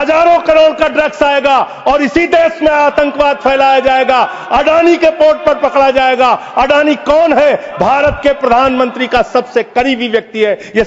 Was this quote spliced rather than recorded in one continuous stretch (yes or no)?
no